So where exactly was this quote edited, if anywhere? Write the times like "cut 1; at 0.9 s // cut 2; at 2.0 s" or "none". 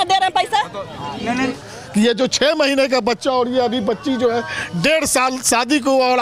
cut 1; at 1.5 s